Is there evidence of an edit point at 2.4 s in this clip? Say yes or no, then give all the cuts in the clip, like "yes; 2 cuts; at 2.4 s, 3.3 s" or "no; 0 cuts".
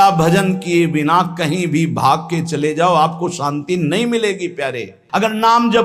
no; 1 cut; at 4.9 s